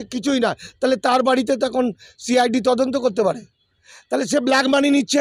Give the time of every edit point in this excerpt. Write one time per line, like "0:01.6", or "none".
none

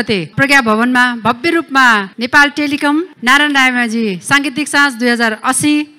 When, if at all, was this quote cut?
none

